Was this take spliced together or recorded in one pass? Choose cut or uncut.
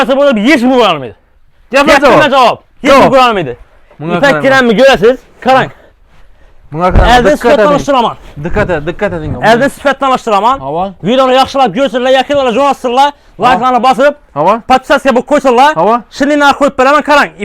uncut